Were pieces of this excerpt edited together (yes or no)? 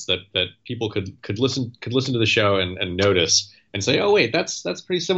no